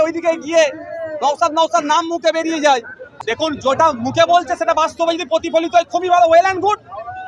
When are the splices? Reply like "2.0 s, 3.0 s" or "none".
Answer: 3.0 s